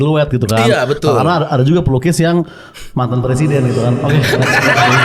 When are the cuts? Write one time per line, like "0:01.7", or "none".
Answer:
none